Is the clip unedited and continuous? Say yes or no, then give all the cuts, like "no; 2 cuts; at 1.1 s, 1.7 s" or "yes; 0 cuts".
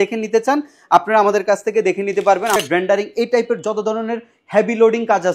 no; 1 cut; at 2.6 s